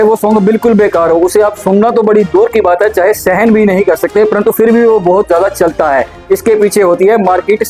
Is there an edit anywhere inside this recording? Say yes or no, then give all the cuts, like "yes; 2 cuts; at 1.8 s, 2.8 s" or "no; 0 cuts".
no; 0 cuts